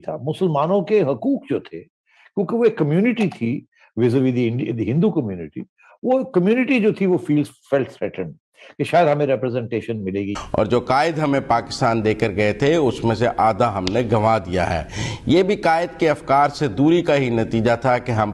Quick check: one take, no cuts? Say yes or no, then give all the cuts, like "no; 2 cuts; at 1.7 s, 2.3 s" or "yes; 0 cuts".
no; 1 cut; at 10.3 s